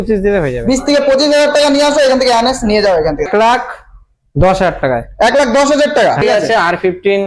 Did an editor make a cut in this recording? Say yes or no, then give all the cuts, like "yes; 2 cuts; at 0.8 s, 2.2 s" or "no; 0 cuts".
yes; 2 cuts; at 3.3 s, 6.2 s